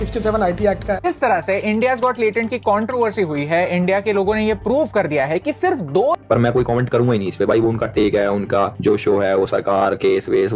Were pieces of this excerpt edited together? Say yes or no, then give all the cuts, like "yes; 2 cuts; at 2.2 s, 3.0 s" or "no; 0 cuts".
yes; 2 cuts; at 1.0 s, 6.2 s